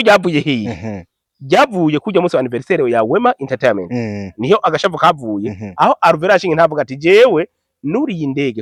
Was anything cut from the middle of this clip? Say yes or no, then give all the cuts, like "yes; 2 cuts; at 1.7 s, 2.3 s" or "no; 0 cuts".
no; 0 cuts